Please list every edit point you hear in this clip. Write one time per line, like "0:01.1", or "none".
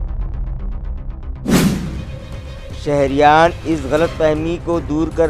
0:02.1